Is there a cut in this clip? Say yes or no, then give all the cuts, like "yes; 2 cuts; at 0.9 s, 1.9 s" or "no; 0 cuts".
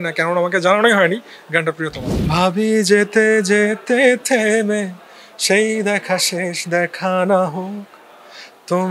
yes; 1 cut; at 2.1 s